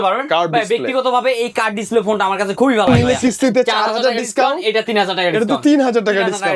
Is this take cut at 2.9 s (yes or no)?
yes